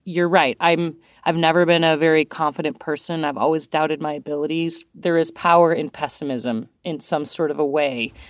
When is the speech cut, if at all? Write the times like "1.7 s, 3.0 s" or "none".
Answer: 4.8 s